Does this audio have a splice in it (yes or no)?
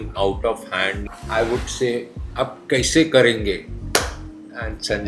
yes